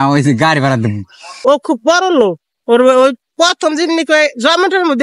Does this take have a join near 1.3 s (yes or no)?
yes